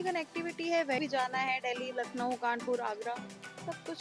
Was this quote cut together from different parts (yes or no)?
yes